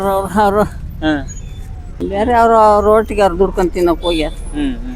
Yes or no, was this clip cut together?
yes